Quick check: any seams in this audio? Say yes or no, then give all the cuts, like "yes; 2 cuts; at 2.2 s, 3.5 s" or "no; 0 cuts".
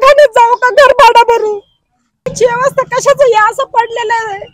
yes; 1 cut; at 2.3 s